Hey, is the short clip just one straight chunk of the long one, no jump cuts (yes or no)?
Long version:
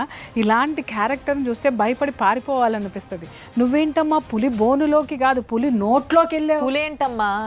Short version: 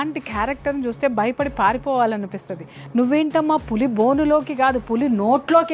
yes